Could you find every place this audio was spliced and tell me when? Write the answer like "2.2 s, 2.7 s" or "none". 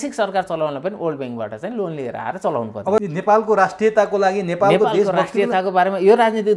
3.0 s